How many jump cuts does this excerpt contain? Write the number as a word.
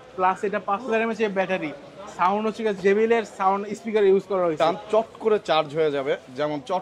one